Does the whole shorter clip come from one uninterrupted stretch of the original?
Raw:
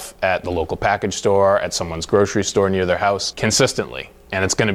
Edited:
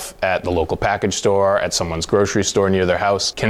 yes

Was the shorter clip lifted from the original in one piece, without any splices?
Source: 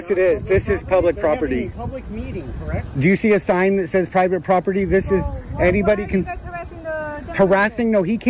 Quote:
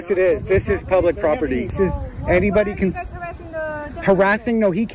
no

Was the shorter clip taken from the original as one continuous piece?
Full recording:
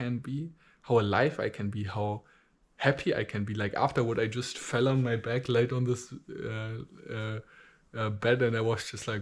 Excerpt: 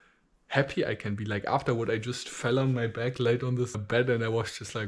no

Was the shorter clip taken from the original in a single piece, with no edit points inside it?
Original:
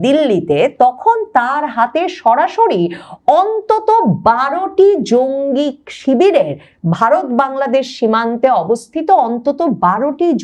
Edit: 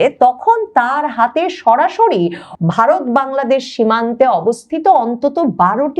no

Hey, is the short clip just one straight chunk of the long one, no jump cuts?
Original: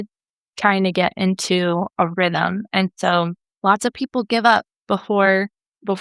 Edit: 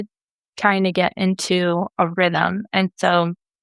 yes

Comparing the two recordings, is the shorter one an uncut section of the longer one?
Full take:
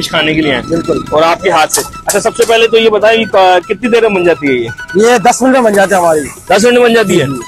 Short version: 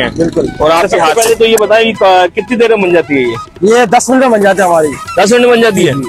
no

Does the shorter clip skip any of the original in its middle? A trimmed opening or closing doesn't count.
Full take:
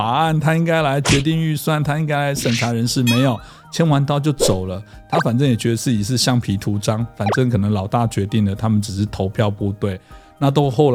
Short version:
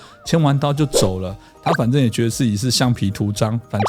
no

